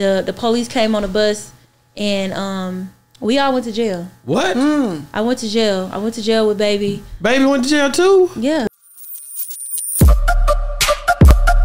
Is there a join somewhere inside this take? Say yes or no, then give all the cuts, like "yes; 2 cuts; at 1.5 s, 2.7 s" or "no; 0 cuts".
yes; 1 cut; at 8.6 s